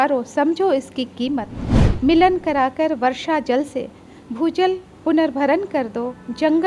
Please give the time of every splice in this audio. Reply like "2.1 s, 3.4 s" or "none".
none